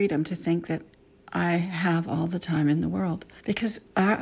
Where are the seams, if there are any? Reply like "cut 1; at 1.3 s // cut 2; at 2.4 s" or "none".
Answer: cut 1; at 3.3 s